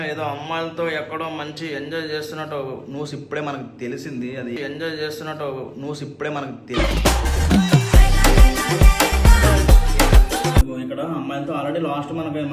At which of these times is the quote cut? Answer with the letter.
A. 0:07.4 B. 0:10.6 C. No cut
B